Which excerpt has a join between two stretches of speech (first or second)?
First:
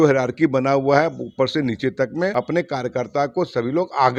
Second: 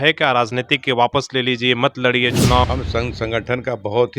second